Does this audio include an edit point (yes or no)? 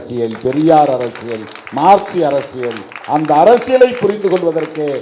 no